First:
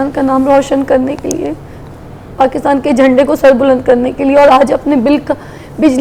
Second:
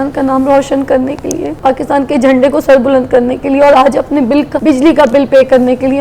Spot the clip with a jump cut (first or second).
second